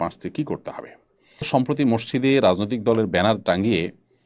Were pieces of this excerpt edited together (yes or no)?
yes